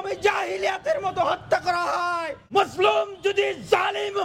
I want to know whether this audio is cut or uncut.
cut